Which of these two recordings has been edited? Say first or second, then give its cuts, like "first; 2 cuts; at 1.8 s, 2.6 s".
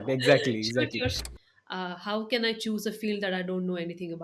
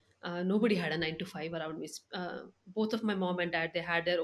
first; 1 cut; at 1.2 s